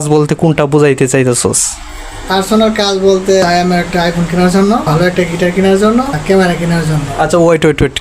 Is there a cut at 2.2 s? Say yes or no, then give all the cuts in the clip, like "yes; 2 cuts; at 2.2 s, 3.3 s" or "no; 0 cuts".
no; 3 cuts; at 3.4 s, 4.9 s, 6.2 s